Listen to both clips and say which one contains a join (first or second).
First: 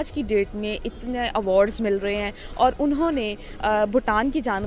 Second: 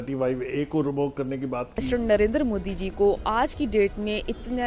second